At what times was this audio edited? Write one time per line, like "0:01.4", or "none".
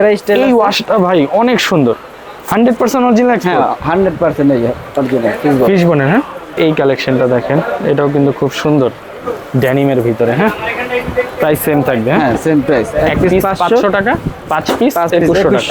none